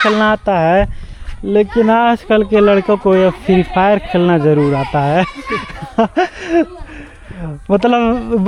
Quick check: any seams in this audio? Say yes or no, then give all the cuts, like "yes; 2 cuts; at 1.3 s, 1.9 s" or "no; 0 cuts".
no; 0 cuts